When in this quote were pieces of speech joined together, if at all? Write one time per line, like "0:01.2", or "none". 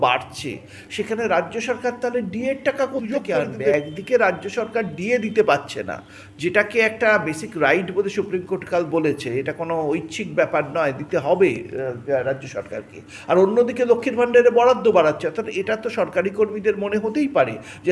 none